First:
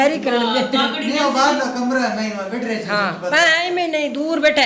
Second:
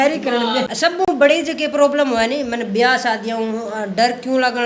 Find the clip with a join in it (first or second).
second